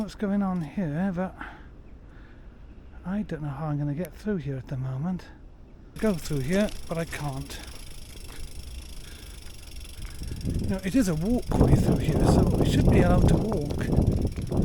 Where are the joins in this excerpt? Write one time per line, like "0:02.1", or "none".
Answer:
0:06.0